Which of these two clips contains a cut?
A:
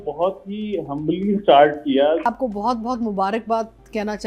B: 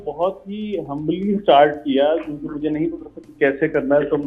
A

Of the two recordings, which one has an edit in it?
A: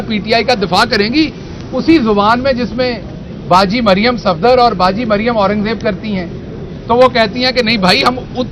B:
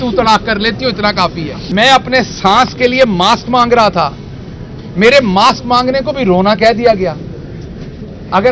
B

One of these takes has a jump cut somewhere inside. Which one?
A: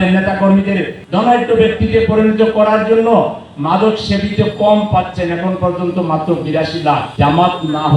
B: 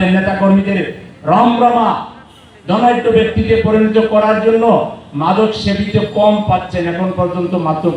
A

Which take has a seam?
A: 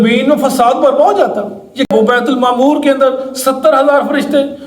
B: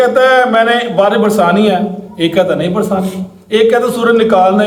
A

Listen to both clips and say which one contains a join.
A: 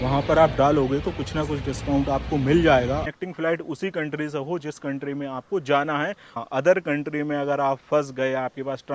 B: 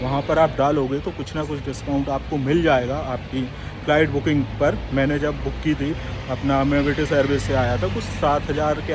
A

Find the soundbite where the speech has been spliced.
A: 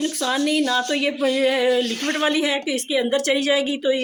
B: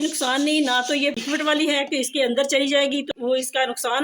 B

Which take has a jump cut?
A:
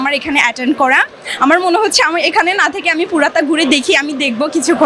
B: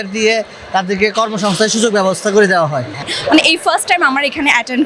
B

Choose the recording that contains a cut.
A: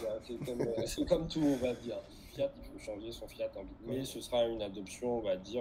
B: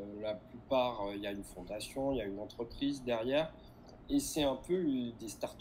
A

